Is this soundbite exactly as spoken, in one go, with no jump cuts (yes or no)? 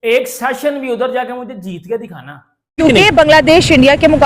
no